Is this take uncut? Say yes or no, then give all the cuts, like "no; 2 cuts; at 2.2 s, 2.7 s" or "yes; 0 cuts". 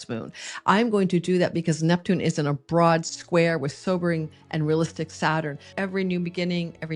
no; 1 cut; at 5.7 s